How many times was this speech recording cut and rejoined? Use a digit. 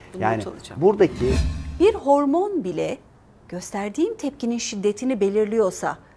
1